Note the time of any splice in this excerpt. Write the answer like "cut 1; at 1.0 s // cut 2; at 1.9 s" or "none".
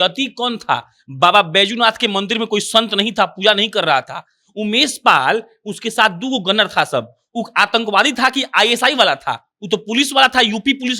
none